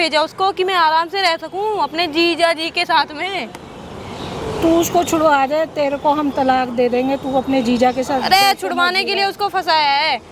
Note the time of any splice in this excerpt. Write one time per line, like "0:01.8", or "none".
none